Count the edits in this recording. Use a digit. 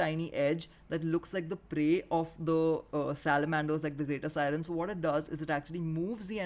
0